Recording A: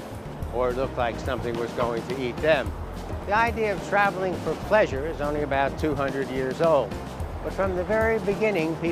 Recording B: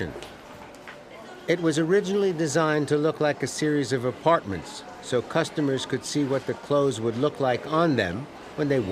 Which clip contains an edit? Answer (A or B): B